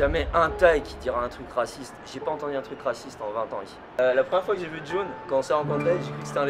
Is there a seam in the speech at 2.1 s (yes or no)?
no